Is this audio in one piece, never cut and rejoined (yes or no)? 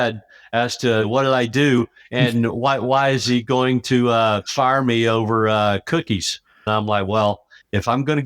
no